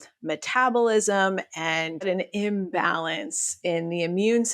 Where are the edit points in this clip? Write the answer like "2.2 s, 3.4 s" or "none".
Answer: 2.1 s